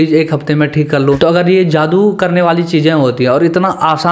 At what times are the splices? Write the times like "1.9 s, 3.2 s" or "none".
1.0 s